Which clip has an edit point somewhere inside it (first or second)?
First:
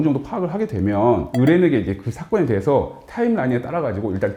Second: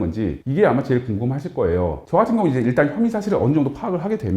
second